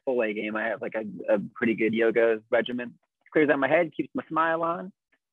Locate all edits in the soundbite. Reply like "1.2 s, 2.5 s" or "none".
3.2 s